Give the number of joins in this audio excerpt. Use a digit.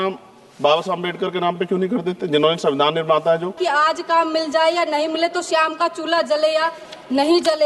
1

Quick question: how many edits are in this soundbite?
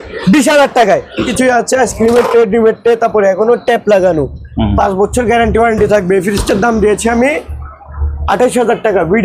1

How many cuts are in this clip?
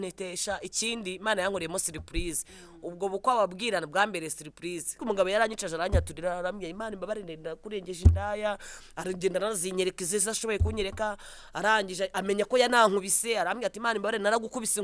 1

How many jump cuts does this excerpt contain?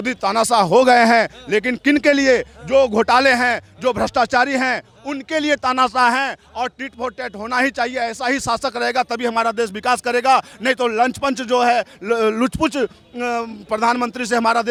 0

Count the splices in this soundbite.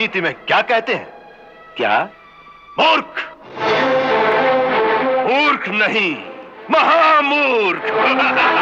0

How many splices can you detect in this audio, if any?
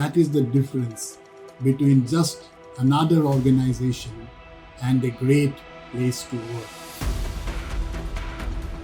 0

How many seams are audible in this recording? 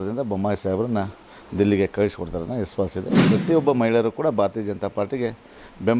1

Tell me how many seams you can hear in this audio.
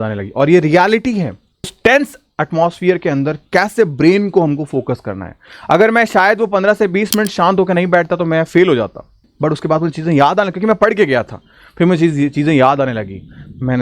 2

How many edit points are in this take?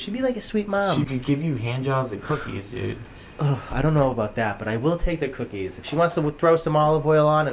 1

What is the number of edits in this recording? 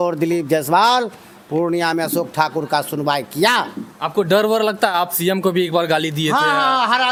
0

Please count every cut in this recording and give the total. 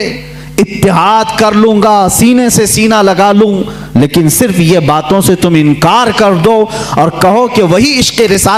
0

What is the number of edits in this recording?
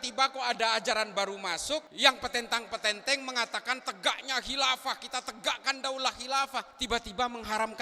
2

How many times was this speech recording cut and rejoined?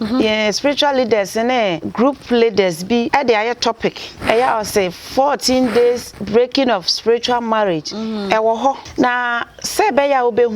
5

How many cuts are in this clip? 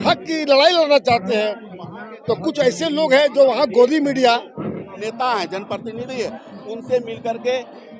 1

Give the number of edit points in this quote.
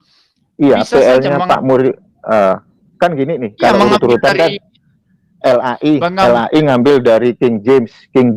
0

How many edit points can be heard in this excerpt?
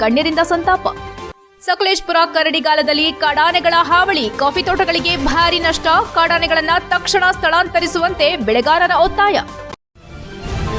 1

